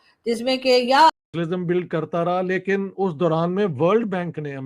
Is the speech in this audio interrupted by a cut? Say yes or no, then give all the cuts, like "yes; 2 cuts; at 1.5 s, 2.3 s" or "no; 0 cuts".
yes; 1 cut; at 1.1 s